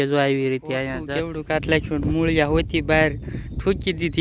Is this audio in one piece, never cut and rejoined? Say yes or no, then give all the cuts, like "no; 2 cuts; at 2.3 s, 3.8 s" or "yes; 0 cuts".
no; 1 cut; at 1.0 s